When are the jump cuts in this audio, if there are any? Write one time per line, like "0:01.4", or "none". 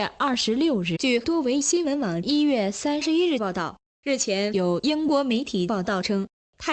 none